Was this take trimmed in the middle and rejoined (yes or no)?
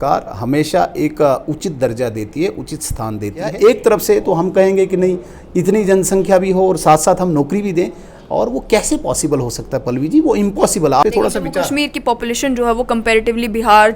yes